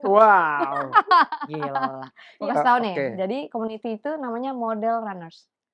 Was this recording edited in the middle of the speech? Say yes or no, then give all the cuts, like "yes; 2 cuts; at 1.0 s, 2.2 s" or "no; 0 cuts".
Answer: yes; 1 cut; at 2.3 s